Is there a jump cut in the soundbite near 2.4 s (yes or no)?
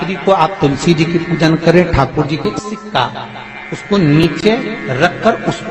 yes